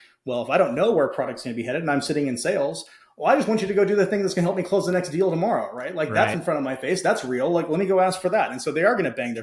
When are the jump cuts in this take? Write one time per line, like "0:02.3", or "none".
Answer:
none